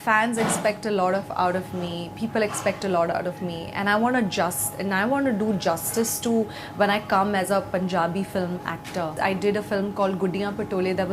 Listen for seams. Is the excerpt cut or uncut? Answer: cut